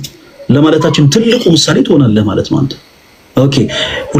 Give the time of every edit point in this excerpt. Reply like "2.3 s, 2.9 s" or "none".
none